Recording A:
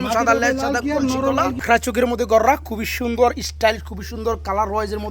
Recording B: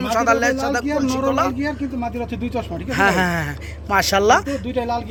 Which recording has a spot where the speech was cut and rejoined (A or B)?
A